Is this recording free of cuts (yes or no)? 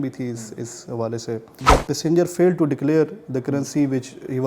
no